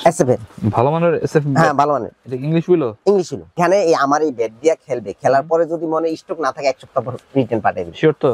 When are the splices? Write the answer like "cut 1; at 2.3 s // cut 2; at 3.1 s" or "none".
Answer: cut 1; at 3.5 s